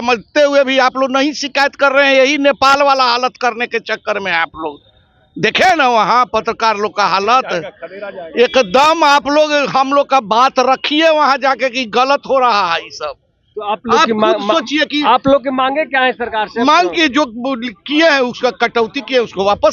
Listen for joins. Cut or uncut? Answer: uncut